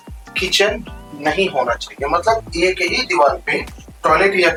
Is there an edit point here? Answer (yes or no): no